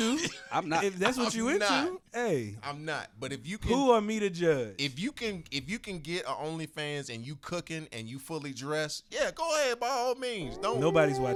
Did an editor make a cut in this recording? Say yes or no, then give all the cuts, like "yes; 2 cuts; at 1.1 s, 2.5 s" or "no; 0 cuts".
no; 0 cuts